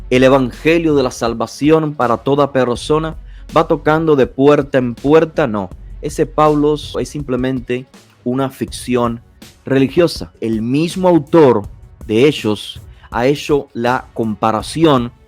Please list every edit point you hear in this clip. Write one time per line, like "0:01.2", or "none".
0:07.0
0:10.3

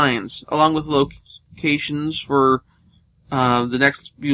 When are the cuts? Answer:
none

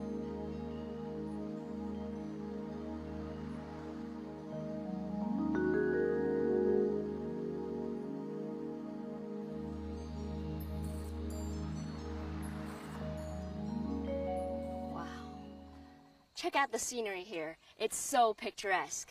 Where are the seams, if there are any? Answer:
none

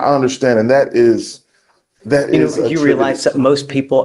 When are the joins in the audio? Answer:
none

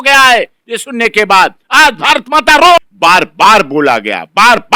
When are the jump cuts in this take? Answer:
0:02.9

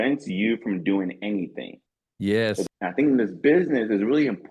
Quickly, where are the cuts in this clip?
0:02.7

